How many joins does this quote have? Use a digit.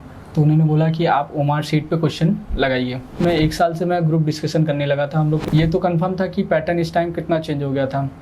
2